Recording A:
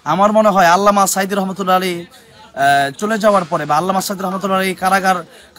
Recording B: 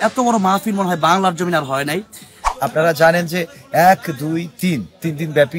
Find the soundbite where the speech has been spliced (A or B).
B